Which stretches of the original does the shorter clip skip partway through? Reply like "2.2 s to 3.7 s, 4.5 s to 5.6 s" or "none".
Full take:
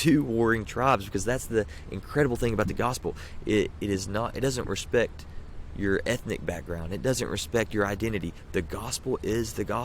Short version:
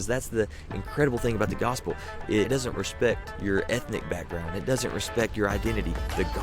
3.7 s to 4.4 s, 5.2 s to 5.7 s